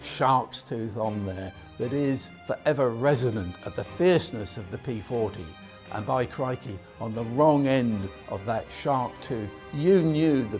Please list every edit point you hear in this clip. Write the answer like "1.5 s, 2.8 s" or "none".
none